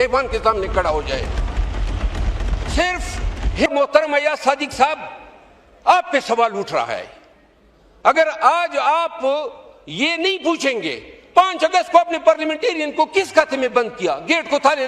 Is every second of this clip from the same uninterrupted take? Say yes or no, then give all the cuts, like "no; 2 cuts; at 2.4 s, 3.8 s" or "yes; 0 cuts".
no; 1 cut; at 3.7 s